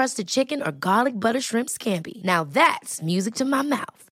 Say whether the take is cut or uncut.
uncut